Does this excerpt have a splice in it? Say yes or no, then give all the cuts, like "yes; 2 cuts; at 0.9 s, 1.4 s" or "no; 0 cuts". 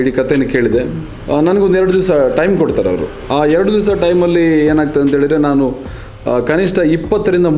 yes; 2 cuts; at 1.0 s, 3.1 s